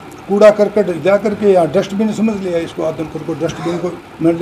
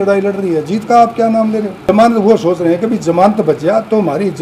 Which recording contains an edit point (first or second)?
second